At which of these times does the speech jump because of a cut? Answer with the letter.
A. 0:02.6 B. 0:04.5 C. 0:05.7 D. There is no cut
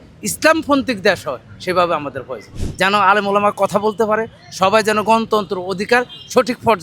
A